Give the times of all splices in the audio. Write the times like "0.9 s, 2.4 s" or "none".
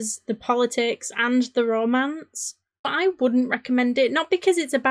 2.9 s